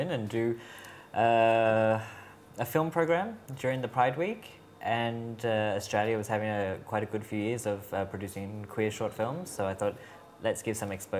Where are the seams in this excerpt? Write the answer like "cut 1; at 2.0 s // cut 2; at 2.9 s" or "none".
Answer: none

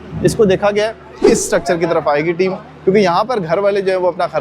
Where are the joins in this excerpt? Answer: cut 1; at 1.2 s

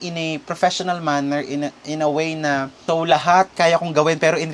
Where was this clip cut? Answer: cut 1; at 2.7 s

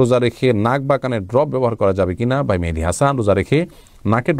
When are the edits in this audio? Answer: none

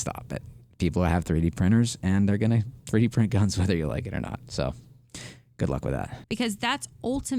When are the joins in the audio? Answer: cut 1; at 6.2 s

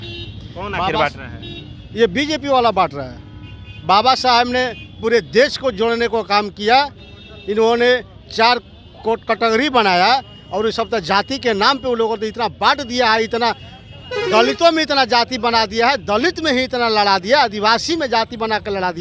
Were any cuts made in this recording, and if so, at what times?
none

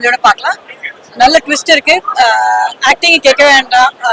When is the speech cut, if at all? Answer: none

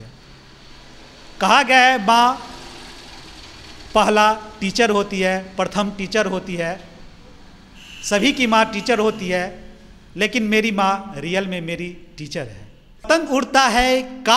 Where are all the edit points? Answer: cut 1; at 13.1 s

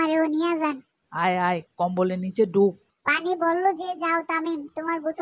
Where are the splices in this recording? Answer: cut 1; at 2.8 s

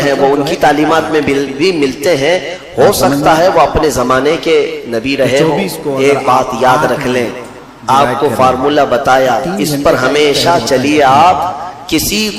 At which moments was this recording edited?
cut 1; at 7.6 s

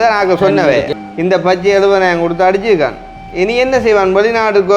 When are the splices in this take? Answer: cut 1; at 0.9 s

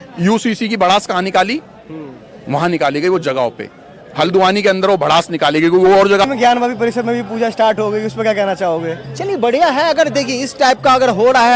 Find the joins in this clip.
cut 1; at 6.3 s

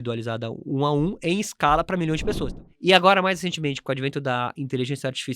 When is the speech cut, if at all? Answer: cut 1; at 2.5 s

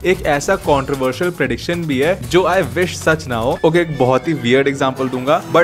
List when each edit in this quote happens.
cut 1; at 3.6 s

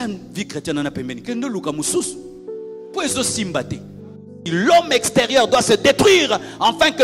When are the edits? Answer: cut 1; at 4.4 s

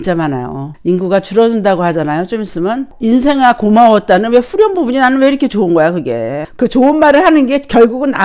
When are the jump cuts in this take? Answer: cut 1; at 2.9 s // cut 2; at 6.5 s

